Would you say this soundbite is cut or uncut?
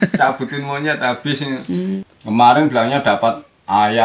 cut